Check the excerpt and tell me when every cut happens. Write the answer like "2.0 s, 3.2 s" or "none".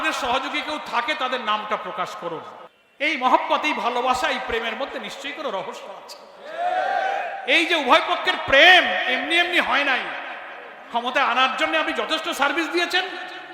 2.6 s